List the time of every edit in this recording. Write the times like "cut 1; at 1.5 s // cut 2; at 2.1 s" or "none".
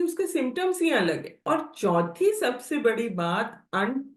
cut 1; at 1.3 s